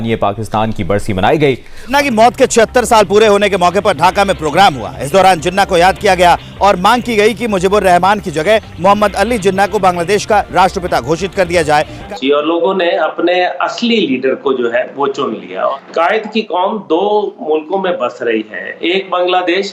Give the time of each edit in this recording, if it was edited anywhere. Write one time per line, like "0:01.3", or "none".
0:01.9
0:12.0
0:15.7